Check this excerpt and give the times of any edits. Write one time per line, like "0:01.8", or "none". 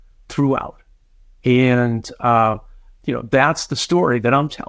none